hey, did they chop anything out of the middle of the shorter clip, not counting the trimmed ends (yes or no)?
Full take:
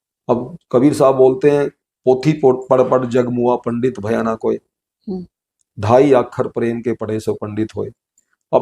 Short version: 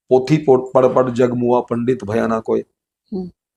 no